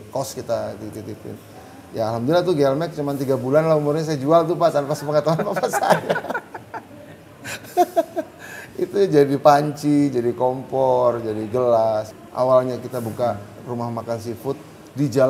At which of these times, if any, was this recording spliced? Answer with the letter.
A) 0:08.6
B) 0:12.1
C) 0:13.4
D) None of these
B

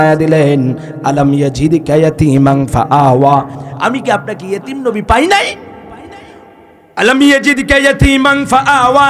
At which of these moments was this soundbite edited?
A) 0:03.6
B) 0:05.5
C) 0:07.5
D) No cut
A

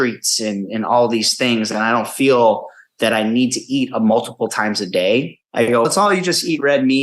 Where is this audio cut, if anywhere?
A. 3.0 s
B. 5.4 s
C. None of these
B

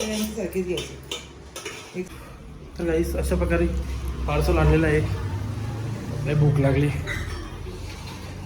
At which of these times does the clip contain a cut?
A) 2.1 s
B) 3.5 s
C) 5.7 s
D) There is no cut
A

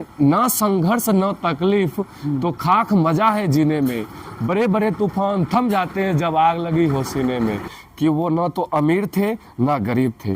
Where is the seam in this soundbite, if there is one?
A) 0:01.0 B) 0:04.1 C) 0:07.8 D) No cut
C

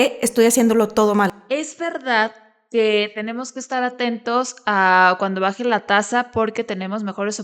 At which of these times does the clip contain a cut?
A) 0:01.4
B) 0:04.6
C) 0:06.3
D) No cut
A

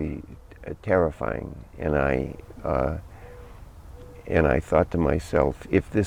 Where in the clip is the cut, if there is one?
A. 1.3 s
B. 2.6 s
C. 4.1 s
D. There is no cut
D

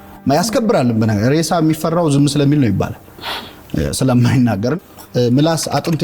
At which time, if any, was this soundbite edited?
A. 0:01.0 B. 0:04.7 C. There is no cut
B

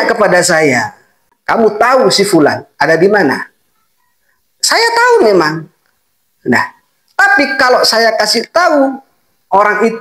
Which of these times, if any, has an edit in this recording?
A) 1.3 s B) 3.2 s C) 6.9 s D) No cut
A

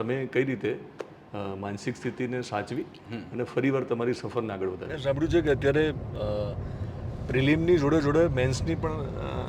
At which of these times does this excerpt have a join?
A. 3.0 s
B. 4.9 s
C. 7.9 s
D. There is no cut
B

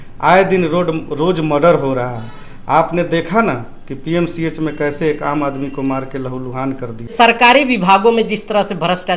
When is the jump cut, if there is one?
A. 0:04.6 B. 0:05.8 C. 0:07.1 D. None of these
C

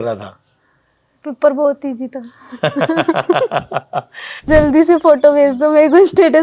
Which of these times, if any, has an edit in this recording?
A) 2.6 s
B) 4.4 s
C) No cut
B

